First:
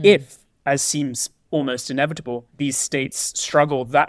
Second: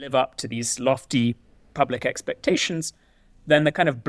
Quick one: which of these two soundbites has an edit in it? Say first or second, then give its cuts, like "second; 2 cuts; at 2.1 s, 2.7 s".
first; 1 cut; at 2.5 s